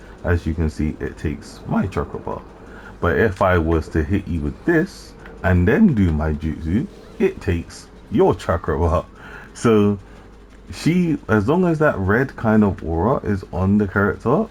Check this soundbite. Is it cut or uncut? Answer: uncut